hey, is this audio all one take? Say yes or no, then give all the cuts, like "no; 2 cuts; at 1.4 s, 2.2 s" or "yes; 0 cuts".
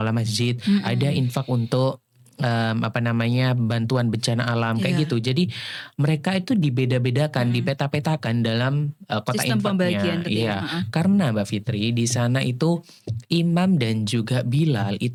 yes; 0 cuts